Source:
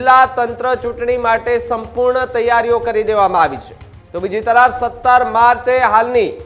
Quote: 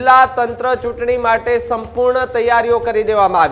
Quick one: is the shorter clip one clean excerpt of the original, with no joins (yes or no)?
yes